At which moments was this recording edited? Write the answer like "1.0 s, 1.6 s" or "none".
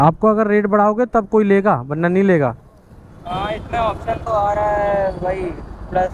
none